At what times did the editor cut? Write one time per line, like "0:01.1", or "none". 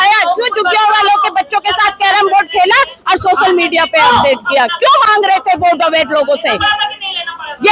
none